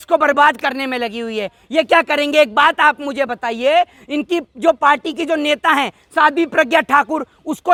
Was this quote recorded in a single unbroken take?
yes; 0 cuts

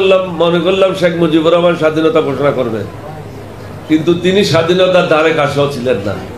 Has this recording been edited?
no; 0 cuts

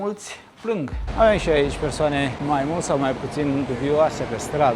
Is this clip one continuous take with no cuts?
no; 2 cuts; at 1.0 s, 2.4 s

